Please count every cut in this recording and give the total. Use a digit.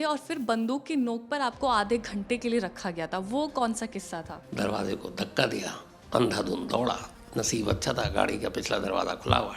1